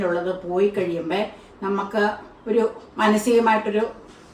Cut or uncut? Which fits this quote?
uncut